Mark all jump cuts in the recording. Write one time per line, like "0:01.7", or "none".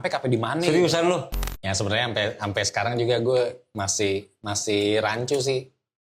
0:01.4